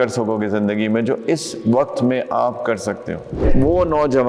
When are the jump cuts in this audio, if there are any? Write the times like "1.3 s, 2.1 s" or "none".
3.4 s